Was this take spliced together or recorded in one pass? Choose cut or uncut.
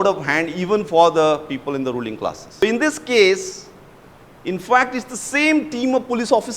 cut